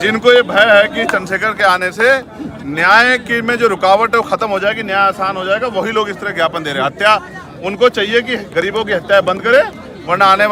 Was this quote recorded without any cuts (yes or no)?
yes